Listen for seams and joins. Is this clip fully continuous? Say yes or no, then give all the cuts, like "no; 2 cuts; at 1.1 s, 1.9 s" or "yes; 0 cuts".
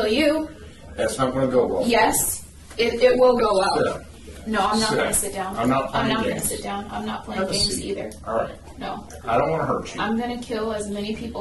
yes; 0 cuts